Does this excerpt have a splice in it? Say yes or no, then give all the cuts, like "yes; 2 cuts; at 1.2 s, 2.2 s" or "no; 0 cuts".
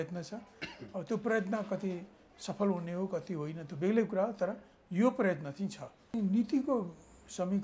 yes; 1 cut; at 6.1 s